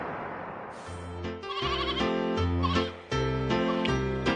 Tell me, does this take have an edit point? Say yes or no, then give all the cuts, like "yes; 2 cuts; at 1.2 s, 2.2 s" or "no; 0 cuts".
yes; 1 cut; at 1.0 s